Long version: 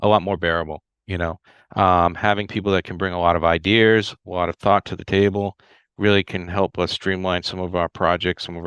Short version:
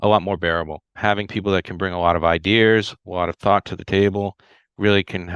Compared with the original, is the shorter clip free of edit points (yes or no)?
no